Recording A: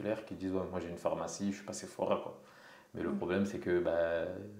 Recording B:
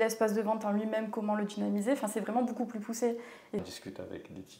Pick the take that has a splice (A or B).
B